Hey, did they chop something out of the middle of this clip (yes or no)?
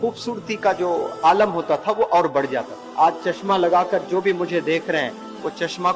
yes